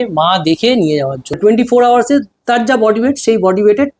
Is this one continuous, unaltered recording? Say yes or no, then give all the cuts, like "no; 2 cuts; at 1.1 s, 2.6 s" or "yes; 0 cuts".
no; 1 cut; at 1.4 s